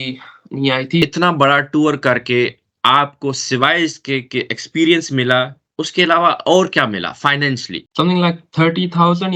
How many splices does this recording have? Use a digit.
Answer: 2